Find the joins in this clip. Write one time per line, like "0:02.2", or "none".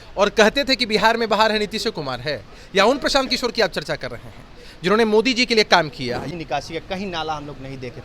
0:06.2